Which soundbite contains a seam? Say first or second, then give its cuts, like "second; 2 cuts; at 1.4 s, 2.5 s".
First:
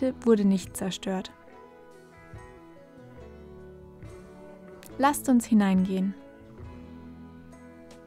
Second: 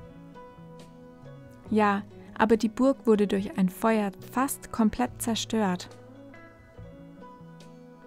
first; 3 cuts; at 1.2 s, 5.0 s, 6.1 s